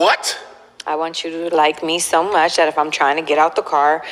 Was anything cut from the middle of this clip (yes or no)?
no